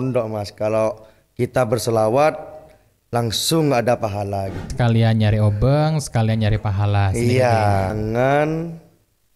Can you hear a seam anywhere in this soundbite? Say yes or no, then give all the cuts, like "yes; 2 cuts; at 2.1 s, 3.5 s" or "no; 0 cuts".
yes; 2 cuts; at 4.7 s, 7.9 s